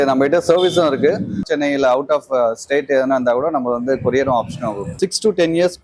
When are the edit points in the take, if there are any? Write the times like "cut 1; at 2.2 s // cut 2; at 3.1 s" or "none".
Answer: cut 1; at 1.4 s // cut 2; at 4.9 s